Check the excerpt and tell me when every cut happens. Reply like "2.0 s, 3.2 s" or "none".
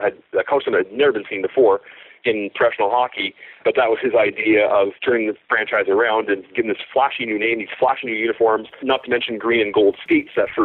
3.6 s, 4.9 s, 8.8 s